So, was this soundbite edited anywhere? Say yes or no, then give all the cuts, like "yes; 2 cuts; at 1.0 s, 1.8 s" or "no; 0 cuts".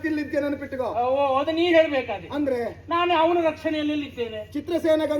no; 0 cuts